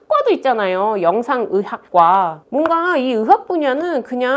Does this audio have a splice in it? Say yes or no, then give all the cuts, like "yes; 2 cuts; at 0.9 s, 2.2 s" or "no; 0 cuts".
yes; 1 cut; at 2.4 s